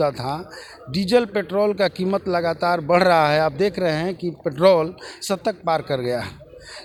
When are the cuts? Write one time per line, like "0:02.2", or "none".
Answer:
none